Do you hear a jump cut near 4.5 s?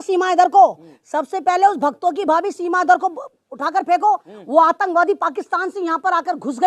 no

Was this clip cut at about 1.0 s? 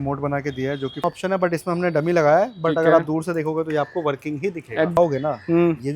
yes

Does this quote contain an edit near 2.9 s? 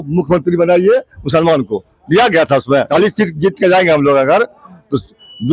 yes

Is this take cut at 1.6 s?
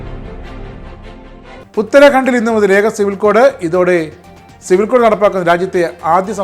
yes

